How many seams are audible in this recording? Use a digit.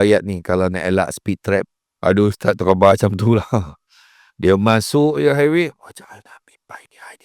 1